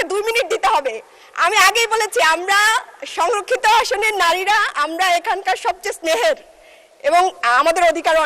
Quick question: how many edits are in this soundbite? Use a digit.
0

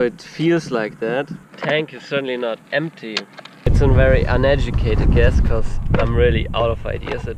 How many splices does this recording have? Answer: 2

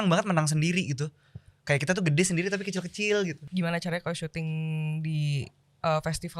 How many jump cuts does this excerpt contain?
1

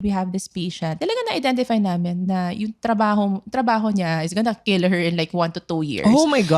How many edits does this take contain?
1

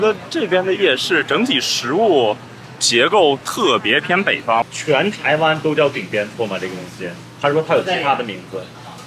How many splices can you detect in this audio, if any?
1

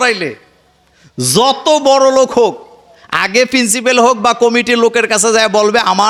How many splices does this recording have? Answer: 0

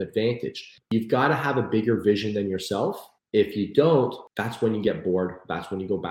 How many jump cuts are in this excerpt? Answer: 3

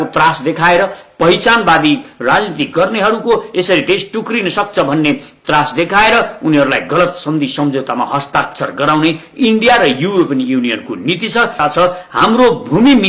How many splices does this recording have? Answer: 1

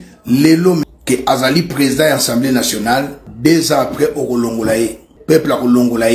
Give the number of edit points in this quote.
3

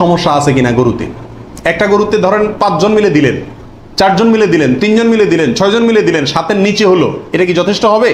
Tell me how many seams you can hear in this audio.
0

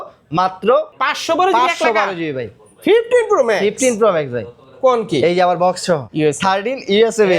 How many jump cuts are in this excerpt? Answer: 2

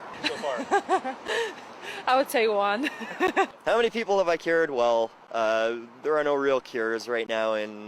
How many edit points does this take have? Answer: 0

